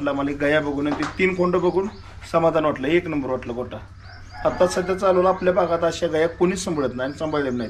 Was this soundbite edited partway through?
no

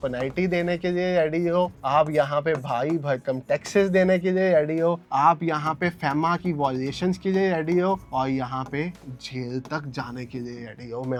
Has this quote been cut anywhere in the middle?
no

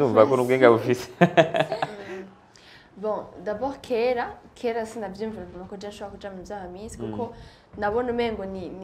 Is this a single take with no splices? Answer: no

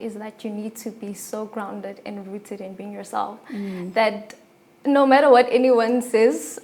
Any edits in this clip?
no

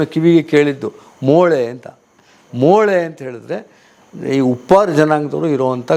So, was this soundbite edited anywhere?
no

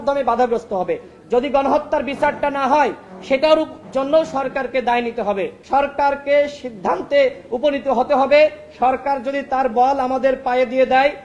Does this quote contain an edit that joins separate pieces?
yes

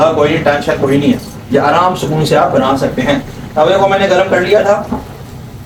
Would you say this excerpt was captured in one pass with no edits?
yes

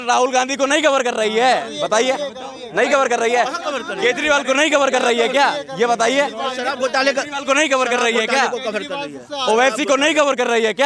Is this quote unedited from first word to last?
yes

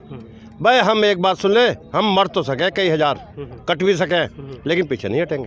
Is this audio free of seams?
yes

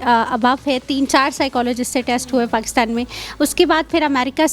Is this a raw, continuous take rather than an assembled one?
yes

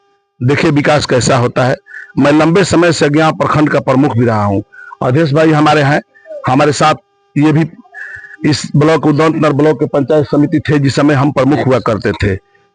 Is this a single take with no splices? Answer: yes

